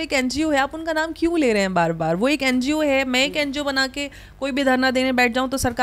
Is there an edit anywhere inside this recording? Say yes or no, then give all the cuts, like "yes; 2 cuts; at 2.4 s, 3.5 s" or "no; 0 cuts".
no; 0 cuts